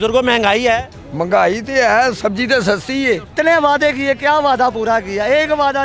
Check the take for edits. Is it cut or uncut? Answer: cut